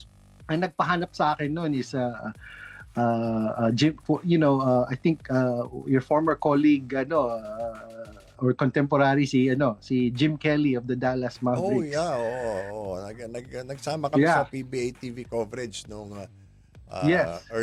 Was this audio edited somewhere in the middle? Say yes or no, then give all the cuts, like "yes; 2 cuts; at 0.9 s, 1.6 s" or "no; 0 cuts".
no; 0 cuts